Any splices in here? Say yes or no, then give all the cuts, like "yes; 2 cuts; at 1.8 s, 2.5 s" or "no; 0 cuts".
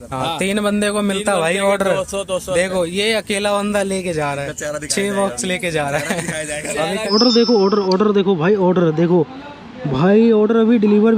yes; 1 cut; at 7.0 s